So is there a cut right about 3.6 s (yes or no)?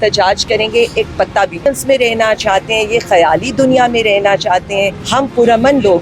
no